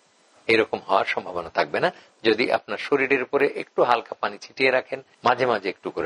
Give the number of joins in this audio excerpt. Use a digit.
1